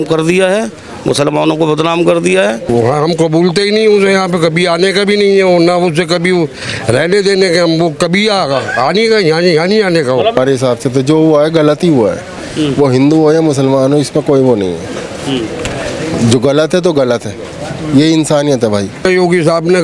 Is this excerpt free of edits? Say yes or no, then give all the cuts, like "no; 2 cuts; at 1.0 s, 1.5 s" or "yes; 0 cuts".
no; 3 cuts; at 2.6 s, 10.4 s, 19.0 s